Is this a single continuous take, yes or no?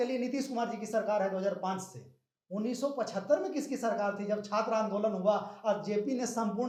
yes